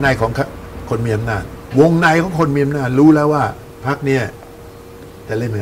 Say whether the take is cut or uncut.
cut